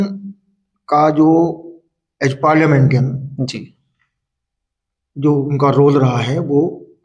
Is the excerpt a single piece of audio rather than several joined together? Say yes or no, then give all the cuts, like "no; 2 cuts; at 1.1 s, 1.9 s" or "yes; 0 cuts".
yes; 0 cuts